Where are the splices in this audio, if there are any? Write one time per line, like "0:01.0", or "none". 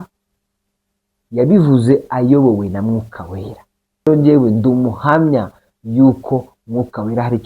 0:04.1